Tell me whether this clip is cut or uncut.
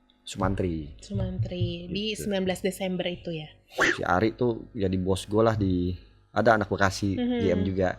cut